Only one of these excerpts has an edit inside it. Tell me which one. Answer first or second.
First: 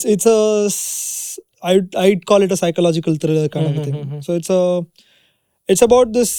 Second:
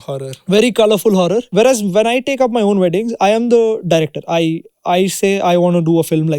second